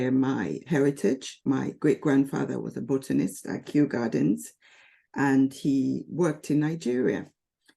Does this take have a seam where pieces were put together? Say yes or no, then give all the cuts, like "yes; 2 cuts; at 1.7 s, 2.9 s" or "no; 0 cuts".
yes; 1 cut; at 1.3 s